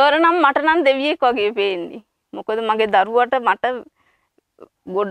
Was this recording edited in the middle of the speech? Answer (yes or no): no